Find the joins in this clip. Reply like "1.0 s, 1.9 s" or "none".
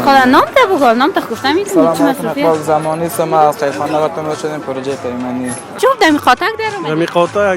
5.7 s